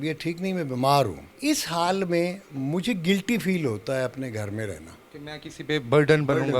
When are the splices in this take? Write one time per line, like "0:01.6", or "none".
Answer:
0:01.3